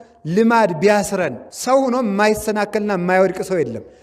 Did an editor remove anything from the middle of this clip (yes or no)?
yes